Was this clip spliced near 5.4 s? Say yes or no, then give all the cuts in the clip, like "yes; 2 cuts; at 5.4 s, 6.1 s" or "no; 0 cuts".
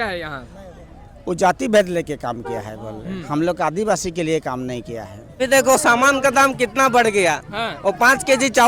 yes; 1 cut; at 5.4 s